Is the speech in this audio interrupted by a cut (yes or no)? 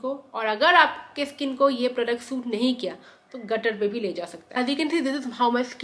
yes